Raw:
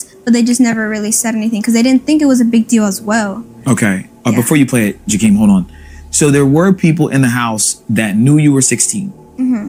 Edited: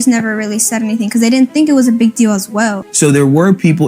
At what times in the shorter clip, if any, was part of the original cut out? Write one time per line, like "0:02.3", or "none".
0:02.8